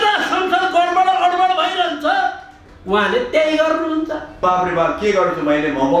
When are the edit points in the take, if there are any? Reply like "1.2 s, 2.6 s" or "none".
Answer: 4.4 s